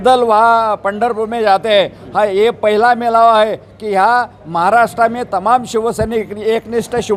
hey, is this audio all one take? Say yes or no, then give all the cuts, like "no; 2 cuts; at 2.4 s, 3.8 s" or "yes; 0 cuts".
yes; 0 cuts